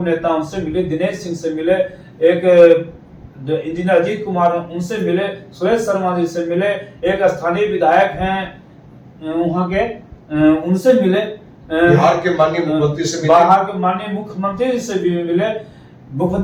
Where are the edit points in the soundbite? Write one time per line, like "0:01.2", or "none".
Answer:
none